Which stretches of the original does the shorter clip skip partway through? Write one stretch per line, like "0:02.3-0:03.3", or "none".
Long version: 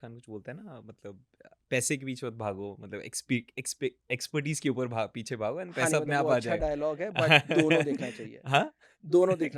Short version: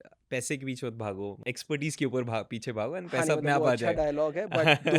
0:02.8-0:04.0